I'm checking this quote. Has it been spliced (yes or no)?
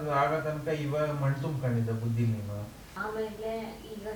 yes